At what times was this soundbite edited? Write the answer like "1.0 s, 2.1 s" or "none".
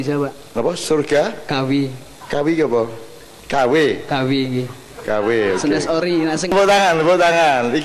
6.5 s